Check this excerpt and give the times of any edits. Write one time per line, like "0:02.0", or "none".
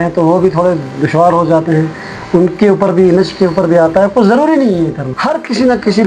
0:05.1